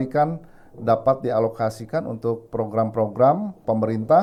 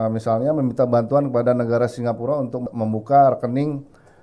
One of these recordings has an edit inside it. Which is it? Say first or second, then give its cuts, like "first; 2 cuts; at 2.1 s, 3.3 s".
second; 1 cut; at 2.6 s